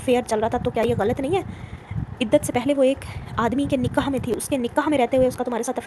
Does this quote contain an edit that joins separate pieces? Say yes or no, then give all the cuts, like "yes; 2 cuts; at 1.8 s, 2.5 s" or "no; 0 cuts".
no; 0 cuts